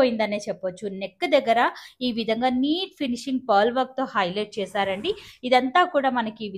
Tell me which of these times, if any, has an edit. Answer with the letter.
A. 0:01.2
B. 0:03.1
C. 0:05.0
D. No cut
D